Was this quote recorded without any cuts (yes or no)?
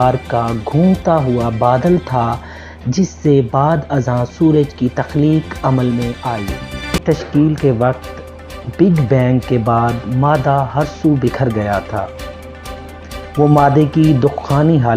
no